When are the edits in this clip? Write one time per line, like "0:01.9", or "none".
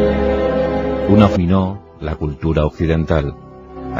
none